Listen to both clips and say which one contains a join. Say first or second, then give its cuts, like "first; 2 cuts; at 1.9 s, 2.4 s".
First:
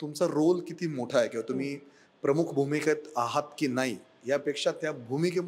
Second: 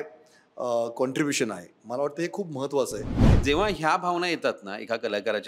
second; 1 cut; at 3.3 s